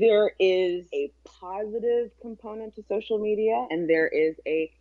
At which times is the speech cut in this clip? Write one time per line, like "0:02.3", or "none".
0:00.9
0:03.7